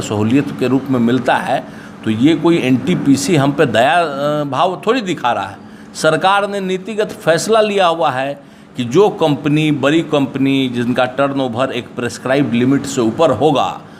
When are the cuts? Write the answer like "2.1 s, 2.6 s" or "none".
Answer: none